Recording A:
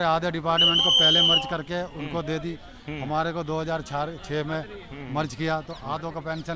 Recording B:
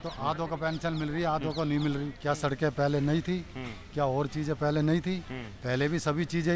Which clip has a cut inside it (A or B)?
B